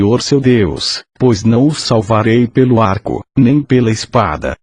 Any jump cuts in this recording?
yes; 1 cut; at 3.5 s

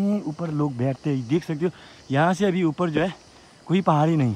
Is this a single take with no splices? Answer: yes; 0 cuts

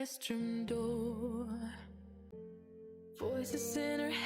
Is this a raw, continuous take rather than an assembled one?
no; 1 cut; at 2.3 s

